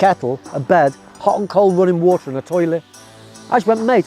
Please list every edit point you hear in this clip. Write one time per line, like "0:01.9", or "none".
none

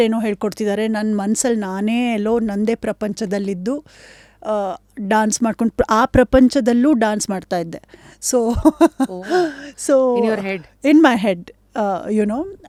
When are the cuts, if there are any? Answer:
none

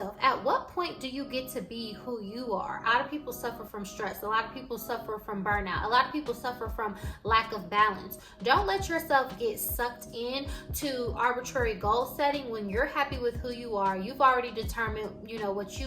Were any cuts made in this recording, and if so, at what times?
0:02.9

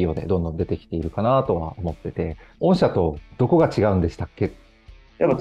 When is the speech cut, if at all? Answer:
0:02.5
0:03.3
0:04.6

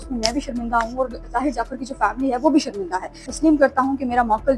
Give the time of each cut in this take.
0:03.3

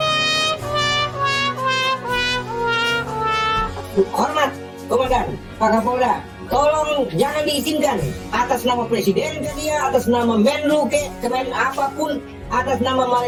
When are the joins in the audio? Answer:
none

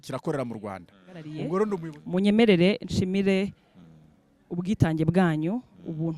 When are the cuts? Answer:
0:01.8

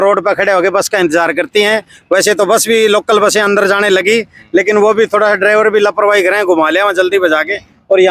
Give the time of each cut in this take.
none

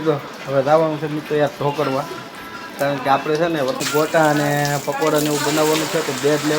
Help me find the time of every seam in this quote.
0:03.8

